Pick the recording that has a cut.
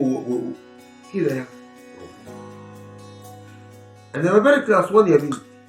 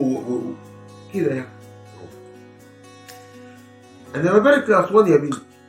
second; 2 cuts; at 1.5 s, 4.1 s

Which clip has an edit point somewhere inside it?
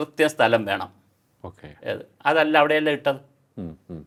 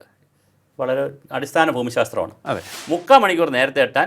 second; 1 cut; at 2.7 s

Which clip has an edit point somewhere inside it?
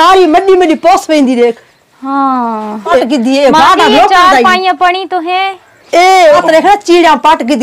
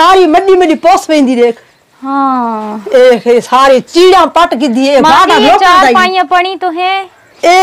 first; 2 cuts; at 3.0 s, 6.4 s

